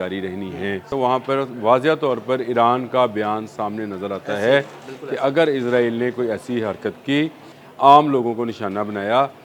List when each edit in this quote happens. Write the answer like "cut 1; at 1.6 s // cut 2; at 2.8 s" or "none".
cut 1; at 0.9 s // cut 2; at 7.5 s